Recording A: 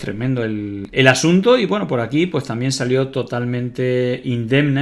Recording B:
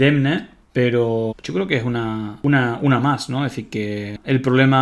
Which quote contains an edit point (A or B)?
B